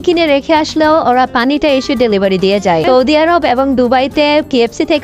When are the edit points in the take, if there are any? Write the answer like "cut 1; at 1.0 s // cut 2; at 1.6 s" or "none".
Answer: cut 1; at 2.8 s